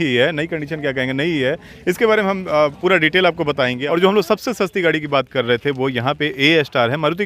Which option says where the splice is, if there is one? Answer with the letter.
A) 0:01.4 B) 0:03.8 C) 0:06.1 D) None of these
B